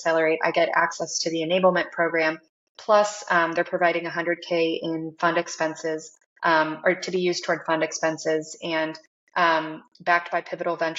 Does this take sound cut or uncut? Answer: uncut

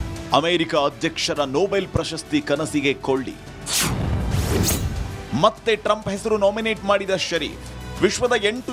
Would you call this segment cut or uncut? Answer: uncut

